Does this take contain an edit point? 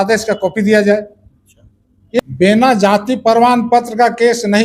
yes; 1 cut; at 2.2 s

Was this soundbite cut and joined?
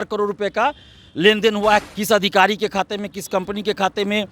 yes; 1 cut; at 1.9 s

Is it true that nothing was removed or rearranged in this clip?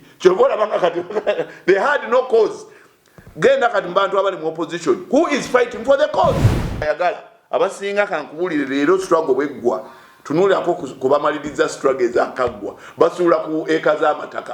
no; 1 cut; at 6.8 s

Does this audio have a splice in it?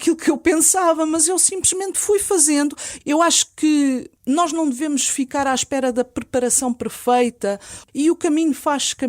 yes; 3 cuts; at 2.9 s, 4.1 s, 7.7 s

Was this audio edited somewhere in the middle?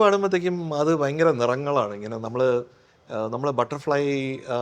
no; 0 cuts

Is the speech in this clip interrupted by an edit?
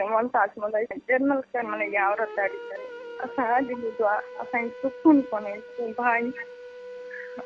yes; 1 cut; at 1.0 s

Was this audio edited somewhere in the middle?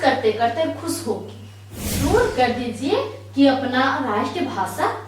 yes; 1 cut; at 2.0 s

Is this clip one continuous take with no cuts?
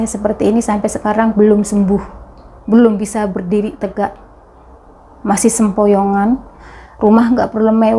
no; 1 cut; at 6.5 s

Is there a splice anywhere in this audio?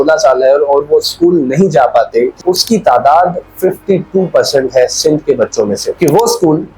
yes; 2 cuts; at 2.4 s, 5.9 s

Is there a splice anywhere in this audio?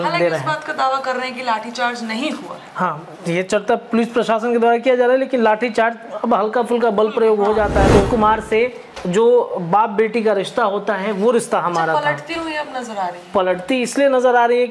yes; 1 cut; at 8.1 s

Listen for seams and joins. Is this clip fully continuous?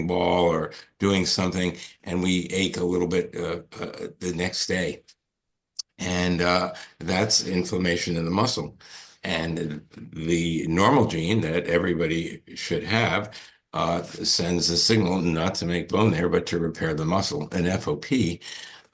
yes; 0 cuts

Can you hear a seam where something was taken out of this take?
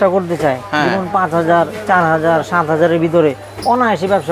no; 0 cuts

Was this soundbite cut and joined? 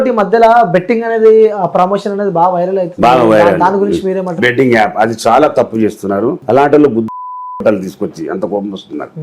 yes; 2 cuts; at 4.4 s, 6.4 s

